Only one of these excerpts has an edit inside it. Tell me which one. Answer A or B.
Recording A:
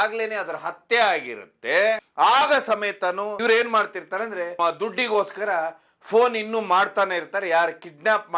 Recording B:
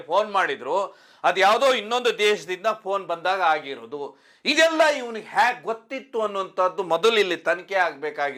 A